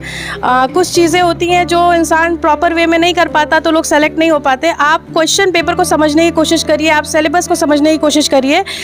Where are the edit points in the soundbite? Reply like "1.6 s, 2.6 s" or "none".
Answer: none